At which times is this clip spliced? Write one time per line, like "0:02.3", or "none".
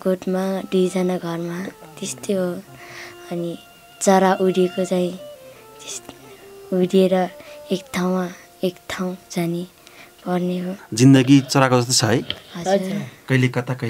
0:10.8